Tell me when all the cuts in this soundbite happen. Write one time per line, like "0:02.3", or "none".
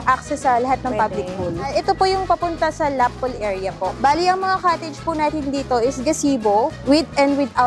0:01.7
0:04.0
0:06.8